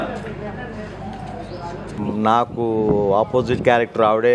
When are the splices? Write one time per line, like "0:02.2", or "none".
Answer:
0:02.0

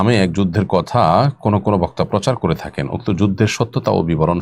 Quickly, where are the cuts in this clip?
none

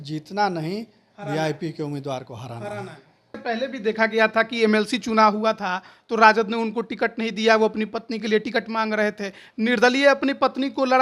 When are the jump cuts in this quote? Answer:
0:03.4

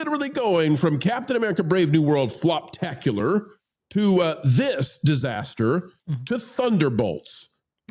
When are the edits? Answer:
none

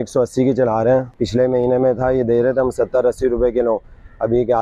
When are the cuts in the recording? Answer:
0:01.2

